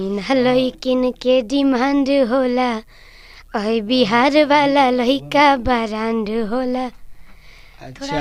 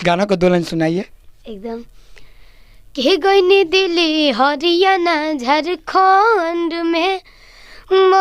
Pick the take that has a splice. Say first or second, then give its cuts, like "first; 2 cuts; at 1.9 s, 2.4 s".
second; 1 cut; at 1.3 s